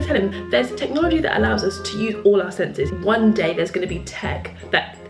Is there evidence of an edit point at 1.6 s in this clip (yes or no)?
no